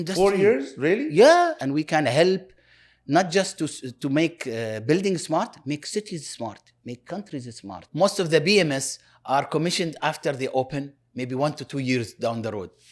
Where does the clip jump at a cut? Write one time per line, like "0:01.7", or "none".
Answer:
0:01.6
0:07.8